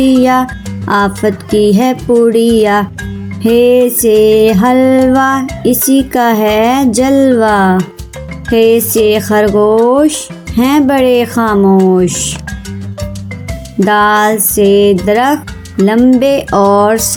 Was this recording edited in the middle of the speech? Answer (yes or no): no